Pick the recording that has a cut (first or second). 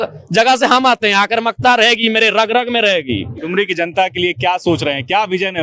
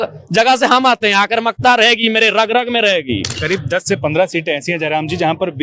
second